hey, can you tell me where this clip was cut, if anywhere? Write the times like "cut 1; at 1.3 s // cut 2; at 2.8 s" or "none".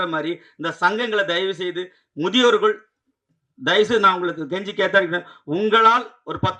none

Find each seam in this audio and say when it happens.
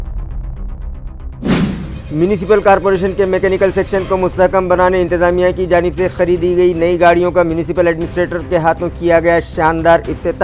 cut 1; at 1.8 s

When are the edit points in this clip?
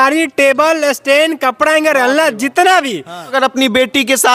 cut 1; at 3.3 s

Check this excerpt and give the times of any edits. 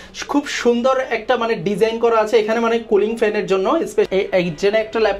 cut 1; at 4.1 s

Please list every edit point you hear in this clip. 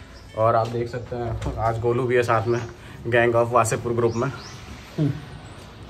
none

